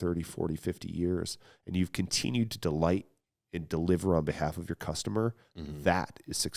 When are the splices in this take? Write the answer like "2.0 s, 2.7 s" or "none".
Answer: none